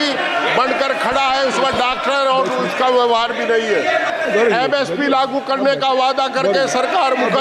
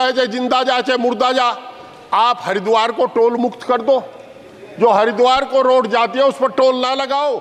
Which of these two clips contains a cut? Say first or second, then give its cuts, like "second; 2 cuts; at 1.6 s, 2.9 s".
first; 1 cut; at 4.1 s